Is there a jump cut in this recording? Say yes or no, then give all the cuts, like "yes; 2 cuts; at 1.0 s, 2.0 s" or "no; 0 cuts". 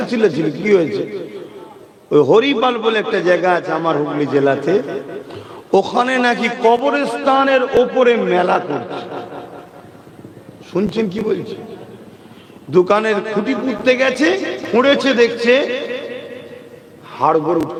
no; 0 cuts